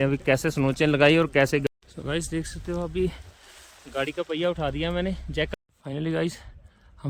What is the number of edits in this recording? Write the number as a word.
two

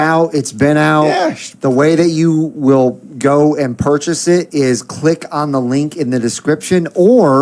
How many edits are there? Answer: zero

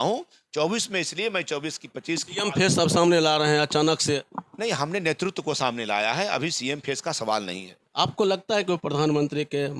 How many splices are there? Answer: one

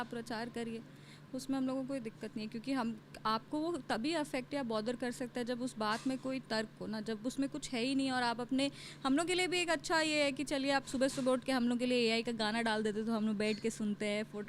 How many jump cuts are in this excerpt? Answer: zero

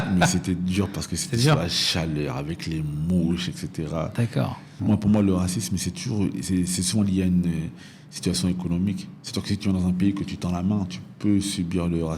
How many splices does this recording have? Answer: one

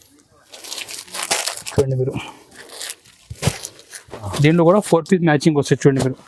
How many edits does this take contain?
one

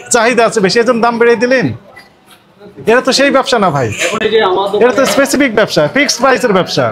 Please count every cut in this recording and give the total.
zero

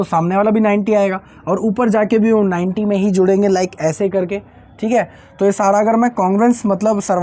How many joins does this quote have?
zero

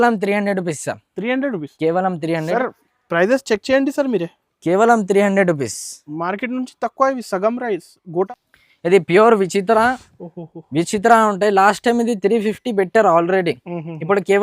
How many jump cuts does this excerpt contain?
one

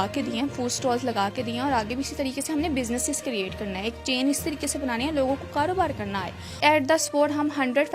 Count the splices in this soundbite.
one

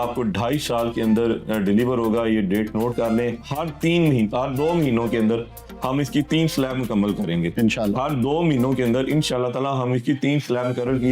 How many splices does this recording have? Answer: zero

